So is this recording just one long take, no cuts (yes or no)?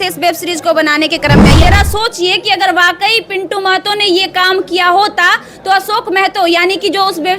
no